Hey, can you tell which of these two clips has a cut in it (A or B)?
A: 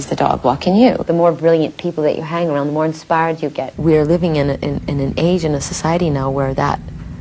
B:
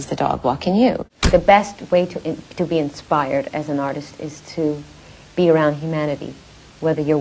A